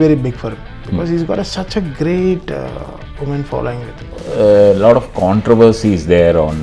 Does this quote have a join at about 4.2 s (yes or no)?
yes